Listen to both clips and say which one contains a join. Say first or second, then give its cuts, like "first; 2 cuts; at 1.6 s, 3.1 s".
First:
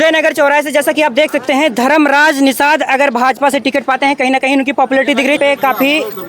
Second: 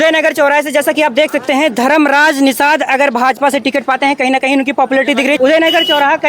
first; 1 cut; at 5.4 s